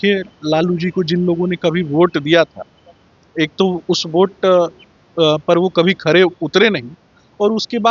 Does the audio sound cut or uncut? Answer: uncut